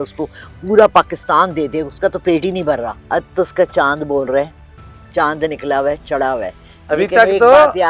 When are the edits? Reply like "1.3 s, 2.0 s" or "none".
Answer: 3.0 s